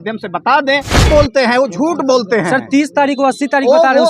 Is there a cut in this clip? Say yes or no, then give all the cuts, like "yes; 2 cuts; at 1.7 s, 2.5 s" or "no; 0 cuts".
yes; 1 cut; at 1.0 s